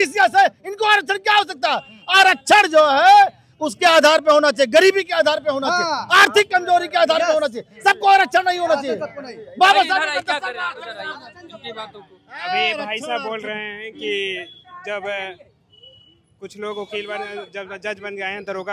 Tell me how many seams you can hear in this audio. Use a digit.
0